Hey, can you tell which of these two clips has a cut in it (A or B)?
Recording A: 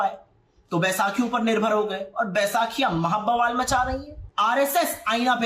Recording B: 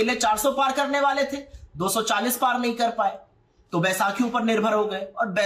A